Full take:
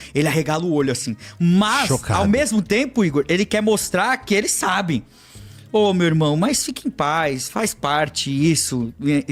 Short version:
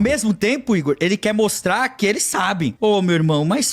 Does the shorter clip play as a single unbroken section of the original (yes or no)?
no